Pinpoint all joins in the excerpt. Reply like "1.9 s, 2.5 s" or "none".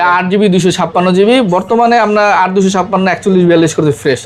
none